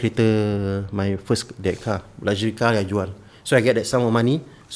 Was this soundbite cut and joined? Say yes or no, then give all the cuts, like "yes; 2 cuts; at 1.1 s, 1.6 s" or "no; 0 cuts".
no; 0 cuts